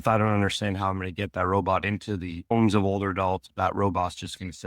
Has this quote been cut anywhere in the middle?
yes; 1 cut; at 3.5 s

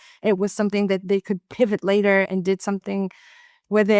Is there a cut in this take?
yes; 2 cuts; at 1.0 s, 2.3 s

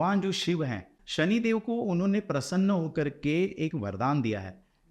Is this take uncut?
no; 1 cut; at 1.0 s

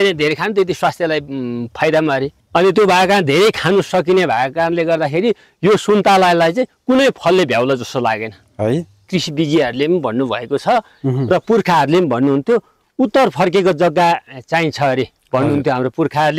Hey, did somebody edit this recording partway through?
yes; 1 cut; at 9.0 s

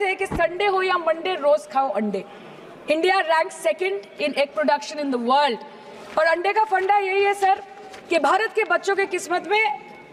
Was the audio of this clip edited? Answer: no; 0 cuts

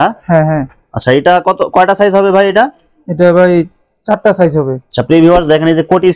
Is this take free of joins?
yes; 0 cuts

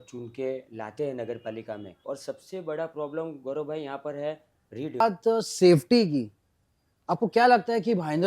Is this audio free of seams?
no; 2 cuts; at 2.0 s, 5.0 s

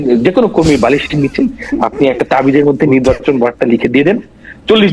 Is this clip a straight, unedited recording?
yes; 0 cuts

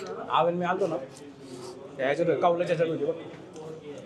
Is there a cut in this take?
no; 0 cuts

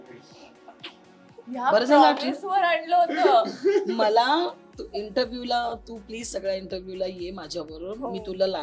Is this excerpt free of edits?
yes; 0 cuts

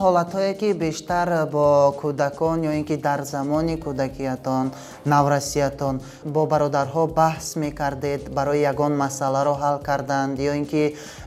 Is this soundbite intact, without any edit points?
yes; 0 cuts

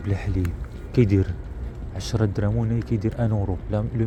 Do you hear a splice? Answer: no; 0 cuts

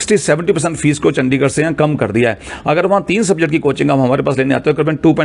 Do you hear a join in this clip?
no; 0 cuts

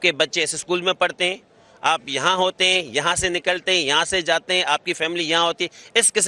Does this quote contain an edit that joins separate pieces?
no; 0 cuts

